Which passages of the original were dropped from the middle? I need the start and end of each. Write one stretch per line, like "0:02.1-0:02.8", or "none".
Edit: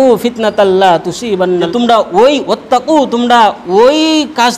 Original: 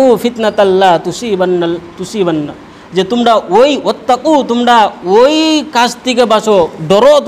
0:01.7-0:03.1